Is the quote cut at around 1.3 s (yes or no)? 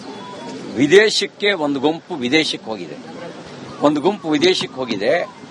no